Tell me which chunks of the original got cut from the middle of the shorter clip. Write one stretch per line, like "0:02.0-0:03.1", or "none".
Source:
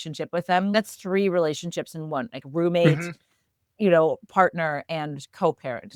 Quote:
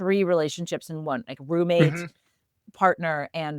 0:03.7-0:04.2